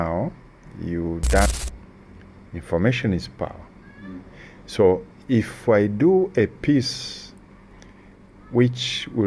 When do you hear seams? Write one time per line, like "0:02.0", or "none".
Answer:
0:01.5

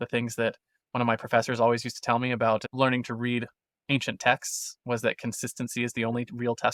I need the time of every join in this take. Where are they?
none

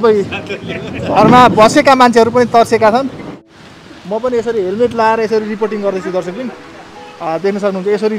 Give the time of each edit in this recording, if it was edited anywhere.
0:03.3

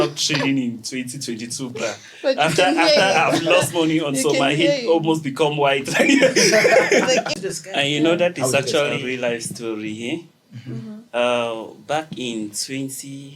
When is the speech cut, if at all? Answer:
0:07.4
0:09.0

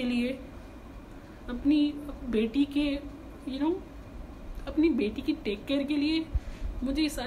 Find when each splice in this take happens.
none

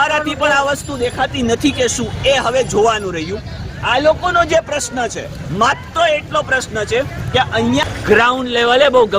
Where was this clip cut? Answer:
0:07.8

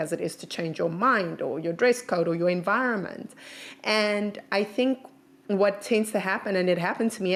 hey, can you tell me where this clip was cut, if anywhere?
none

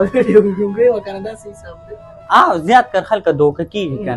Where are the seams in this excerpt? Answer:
none

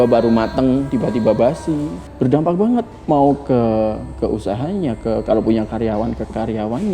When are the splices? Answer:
0:00.9
0:02.0

